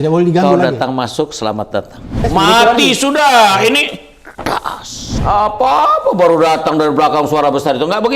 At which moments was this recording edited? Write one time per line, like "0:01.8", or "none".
0:02.2
0:05.1